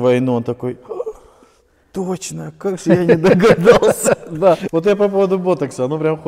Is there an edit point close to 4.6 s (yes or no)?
yes